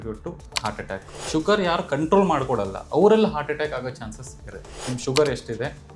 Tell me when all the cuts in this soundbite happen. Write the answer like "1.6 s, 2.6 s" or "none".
1.1 s, 4.8 s